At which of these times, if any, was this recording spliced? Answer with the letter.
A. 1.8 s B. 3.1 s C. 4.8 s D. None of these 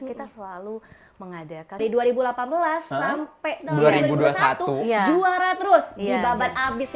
A